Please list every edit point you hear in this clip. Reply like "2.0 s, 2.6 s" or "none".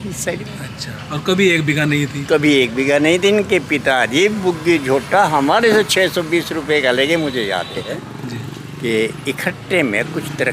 7.9 s